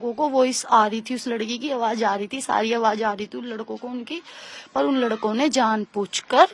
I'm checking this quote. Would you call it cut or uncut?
uncut